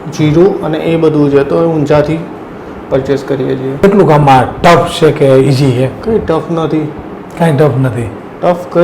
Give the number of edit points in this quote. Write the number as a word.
one